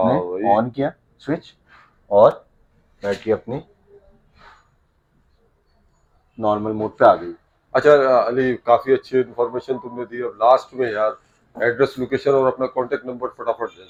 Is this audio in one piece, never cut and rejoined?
yes; 0 cuts

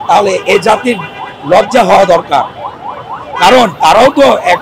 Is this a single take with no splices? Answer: yes; 0 cuts

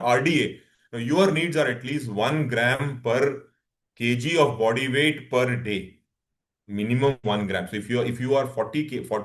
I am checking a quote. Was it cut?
no; 0 cuts

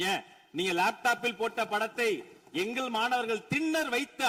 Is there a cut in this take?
no; 0 cuts

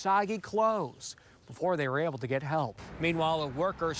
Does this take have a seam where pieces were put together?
yes; 1 cut; at 2.8 s

